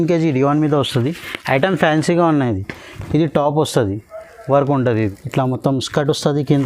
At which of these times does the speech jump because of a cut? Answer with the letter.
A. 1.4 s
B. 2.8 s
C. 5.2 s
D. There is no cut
C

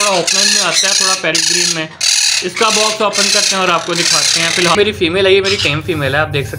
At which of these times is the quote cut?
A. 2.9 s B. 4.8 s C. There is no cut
B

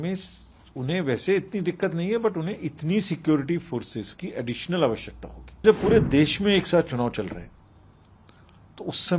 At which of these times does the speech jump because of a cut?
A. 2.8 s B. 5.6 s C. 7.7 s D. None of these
B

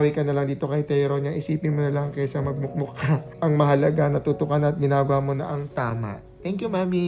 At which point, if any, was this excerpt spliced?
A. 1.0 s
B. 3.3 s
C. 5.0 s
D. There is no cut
B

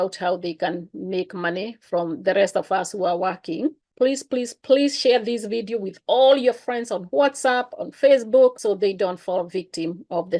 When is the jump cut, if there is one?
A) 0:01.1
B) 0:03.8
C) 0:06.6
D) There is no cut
B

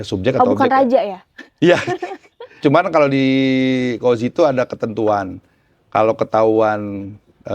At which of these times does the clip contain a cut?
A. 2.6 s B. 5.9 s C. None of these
A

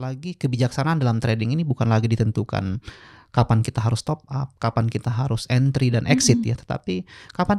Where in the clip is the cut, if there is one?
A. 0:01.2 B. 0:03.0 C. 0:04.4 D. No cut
D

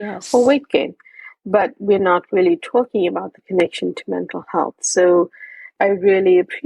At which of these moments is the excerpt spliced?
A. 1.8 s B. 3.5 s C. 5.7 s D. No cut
C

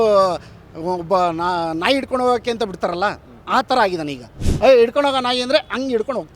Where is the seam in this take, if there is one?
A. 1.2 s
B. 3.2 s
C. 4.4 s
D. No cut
C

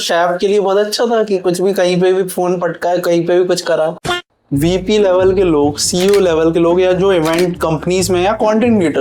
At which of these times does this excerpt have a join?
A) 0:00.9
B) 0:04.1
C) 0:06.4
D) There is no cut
B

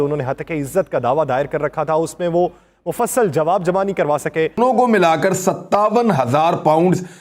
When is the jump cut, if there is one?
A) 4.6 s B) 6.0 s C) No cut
A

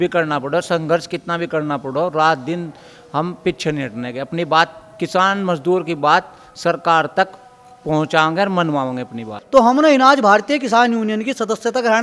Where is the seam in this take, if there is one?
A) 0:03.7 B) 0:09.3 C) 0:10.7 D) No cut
B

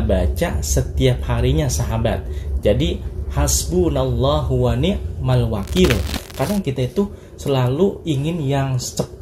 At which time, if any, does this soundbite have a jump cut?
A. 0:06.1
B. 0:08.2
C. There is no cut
A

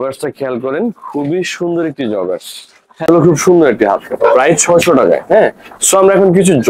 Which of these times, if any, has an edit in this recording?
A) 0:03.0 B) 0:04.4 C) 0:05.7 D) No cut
A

